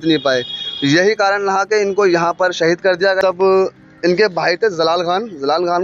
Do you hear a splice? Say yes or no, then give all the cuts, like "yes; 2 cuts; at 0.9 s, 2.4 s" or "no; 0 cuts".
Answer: yes; 1 cut; at 3.2 s